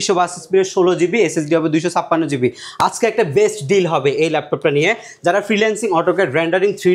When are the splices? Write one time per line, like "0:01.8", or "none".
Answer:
none